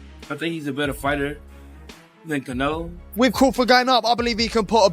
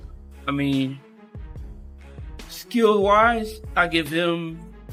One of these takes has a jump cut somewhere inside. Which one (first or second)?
first